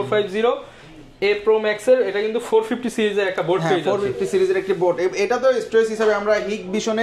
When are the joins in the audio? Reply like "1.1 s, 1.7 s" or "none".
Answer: none